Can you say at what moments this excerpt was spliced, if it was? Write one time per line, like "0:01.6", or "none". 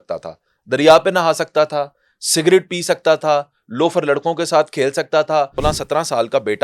0:05.5